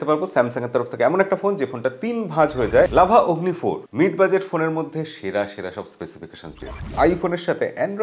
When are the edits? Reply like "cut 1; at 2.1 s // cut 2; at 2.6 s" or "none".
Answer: cut 1; at 2.9 s // cut 2; at 6.9 s